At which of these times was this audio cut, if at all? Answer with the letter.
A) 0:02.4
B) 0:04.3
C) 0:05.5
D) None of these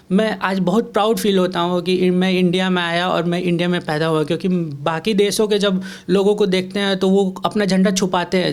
D